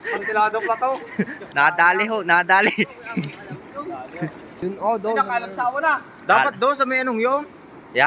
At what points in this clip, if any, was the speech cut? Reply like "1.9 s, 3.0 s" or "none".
1.5 s, 4.5 s